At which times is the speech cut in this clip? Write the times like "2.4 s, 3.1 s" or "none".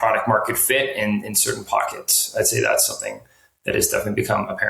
none